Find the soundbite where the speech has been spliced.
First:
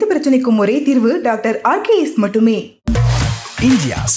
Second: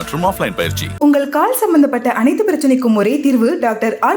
first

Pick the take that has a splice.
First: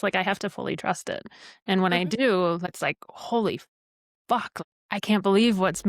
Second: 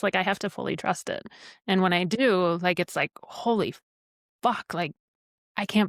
first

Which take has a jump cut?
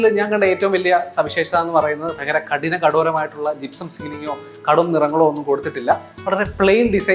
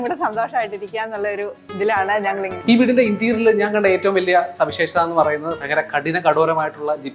second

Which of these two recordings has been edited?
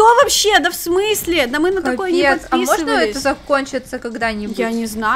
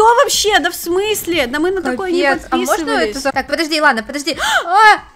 second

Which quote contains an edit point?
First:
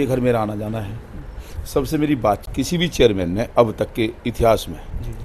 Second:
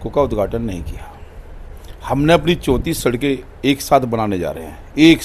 first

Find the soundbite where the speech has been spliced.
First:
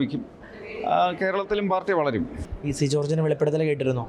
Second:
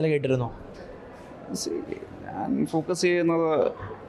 first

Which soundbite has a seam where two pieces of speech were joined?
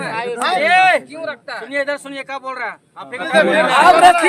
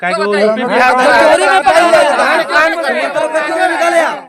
first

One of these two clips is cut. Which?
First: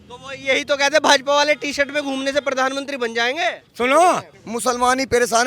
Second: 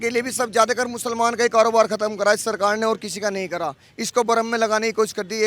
first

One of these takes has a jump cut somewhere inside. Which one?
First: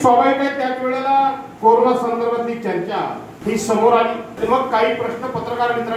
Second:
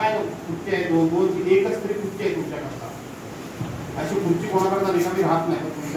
first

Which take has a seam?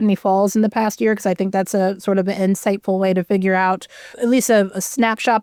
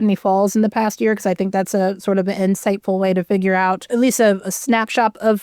second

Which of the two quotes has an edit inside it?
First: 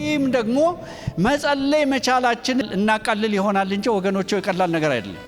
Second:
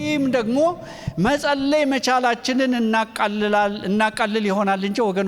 first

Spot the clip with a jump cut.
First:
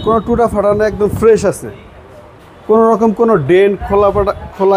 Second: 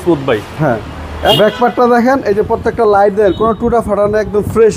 second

